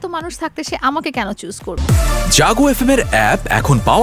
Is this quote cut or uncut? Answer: cut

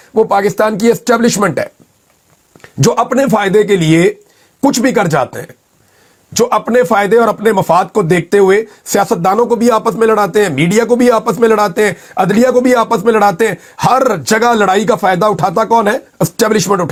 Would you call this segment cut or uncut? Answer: uncut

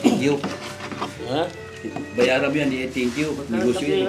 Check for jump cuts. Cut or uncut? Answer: uncut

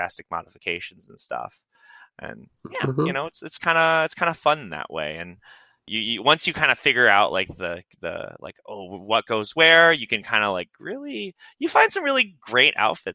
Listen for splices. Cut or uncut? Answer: uncut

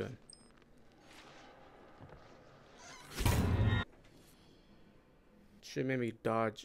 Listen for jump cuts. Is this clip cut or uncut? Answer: cut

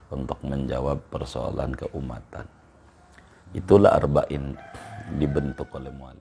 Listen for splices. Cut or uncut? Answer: uncut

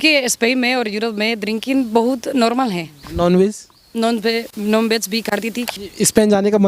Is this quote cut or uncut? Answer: cut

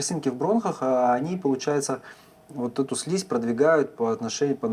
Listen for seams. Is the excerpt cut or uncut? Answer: uncut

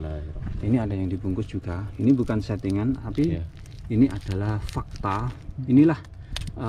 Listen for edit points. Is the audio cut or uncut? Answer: uncut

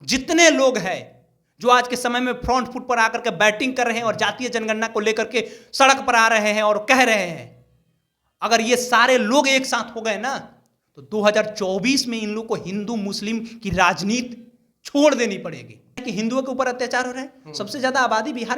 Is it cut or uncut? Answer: cut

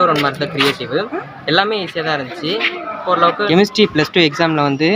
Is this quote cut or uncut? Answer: cut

